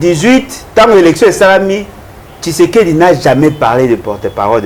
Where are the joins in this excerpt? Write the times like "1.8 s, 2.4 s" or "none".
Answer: none